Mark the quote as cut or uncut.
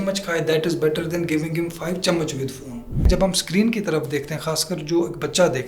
cut